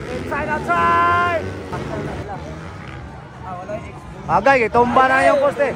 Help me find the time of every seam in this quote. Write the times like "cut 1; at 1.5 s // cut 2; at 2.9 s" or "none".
cut 1; at 1.7 s

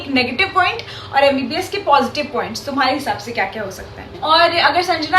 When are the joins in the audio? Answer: cut 1; at 4.0 s

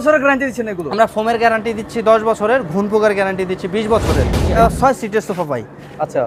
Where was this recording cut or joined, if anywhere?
cut 1; at 4.4 s

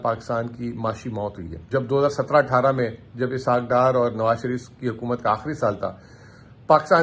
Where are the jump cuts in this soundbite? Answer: cut 1; at 1.6 s

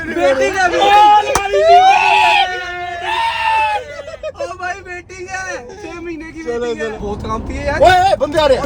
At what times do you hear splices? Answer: cut 1; at 6.9 s

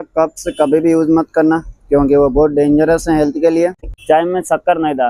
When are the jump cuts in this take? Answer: cut 1; at 3.8 s

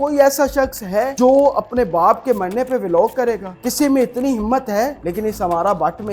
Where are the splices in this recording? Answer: cut 1; at 1.1 s // cut 2; at 3.5 s // cut 3; at 5.0 s

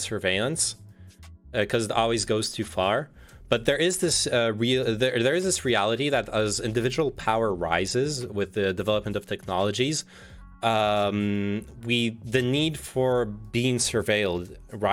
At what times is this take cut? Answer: none

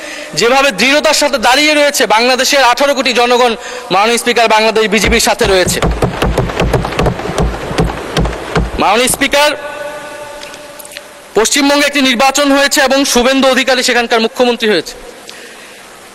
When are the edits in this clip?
none

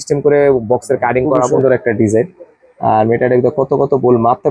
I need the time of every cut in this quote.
cut 1; at 1.5 s

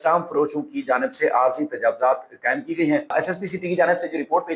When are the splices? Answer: cut 1; at 3.1 s

